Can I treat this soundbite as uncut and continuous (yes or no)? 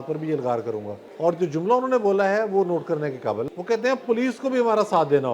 no